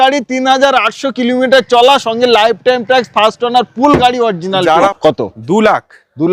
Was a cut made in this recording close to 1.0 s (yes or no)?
no